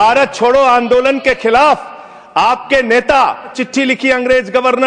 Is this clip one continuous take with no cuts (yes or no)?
no